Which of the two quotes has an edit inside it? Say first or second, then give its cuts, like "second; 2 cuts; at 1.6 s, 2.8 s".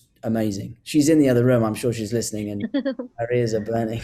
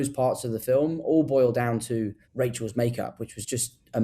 second; 1 cut; at 2.2 s